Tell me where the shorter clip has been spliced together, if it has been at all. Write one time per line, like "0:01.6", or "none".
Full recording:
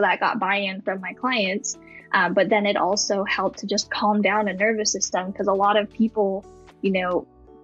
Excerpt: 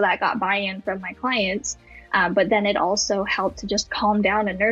none